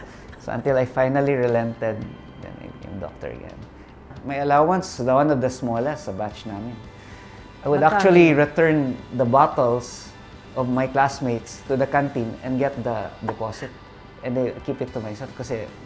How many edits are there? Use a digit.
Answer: 1